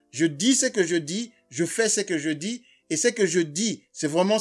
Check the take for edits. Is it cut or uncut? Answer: uncut